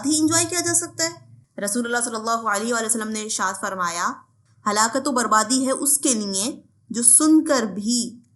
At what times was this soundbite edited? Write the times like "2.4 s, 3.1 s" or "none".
1.3 s

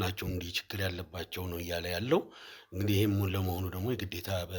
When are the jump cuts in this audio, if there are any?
none

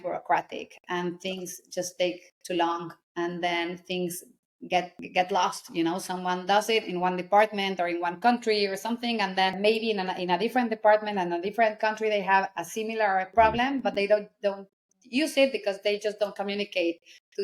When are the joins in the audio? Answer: none

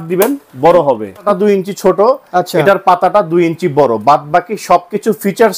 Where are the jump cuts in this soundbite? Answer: 1.2 s

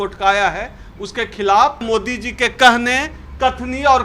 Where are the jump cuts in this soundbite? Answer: 1.8 s

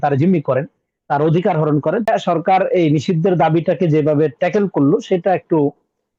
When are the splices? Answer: 2.1 s

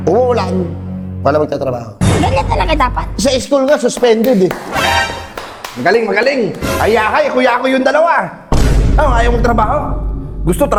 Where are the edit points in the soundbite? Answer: none

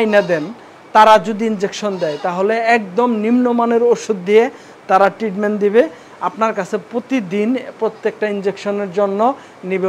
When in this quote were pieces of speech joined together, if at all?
none

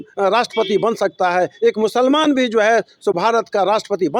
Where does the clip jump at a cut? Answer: none

